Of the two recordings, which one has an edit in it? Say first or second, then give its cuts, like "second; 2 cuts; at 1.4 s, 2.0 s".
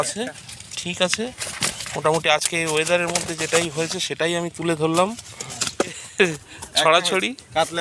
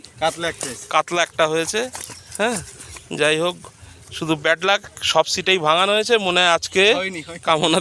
first; 1 cut; at 6.0 s